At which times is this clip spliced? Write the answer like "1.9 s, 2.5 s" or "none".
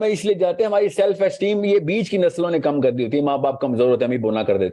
none